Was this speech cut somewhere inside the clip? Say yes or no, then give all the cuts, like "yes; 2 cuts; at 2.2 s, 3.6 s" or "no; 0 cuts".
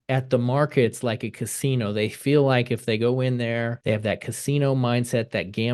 yes; 1 cut; at 3.8 s